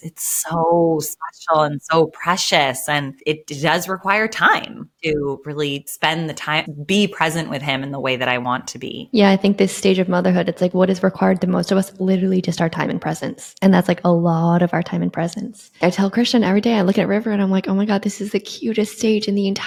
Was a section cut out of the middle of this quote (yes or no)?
no